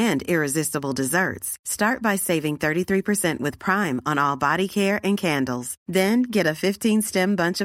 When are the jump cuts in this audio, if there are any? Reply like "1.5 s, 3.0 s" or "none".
none